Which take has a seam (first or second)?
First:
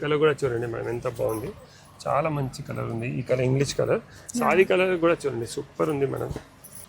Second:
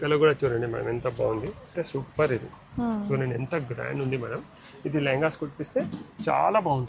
second